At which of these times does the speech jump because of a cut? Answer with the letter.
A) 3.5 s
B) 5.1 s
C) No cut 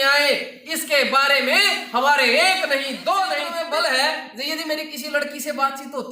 A